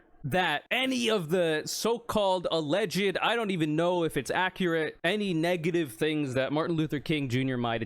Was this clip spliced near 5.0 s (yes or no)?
yes